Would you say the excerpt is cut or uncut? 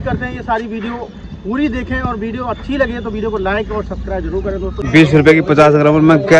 cut